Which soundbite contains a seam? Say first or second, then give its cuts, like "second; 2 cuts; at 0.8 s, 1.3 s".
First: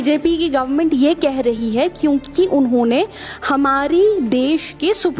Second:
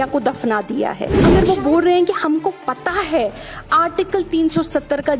second; 1 cut; at 1.2 s